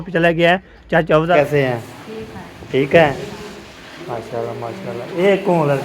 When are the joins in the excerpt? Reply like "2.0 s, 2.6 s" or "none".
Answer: 1.3 s

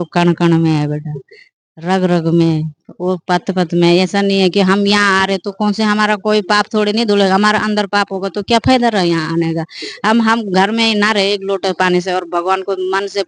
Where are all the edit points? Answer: none

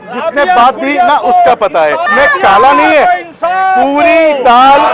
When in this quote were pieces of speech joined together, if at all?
2.0 s

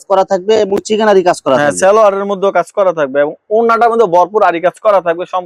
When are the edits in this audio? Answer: none

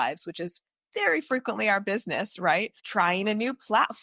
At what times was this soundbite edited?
2.8 s

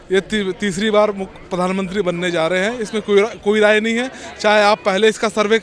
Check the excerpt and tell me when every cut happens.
none

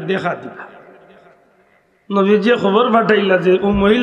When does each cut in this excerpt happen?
none

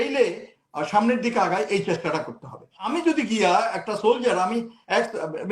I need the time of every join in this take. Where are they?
2.8 s

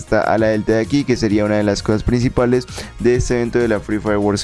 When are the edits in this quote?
none

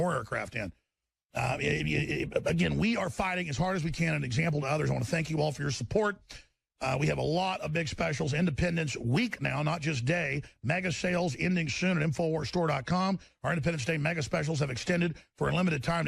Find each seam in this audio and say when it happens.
14.9 s

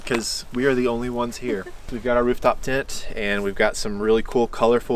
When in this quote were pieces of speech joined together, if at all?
1.9 s

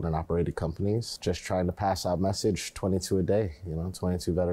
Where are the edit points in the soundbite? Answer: 1.1 s

